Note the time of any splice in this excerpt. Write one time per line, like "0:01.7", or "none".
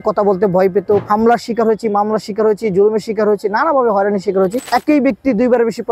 0:01.0
0:04.6